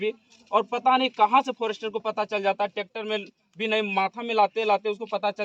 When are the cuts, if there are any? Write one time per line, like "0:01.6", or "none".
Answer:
none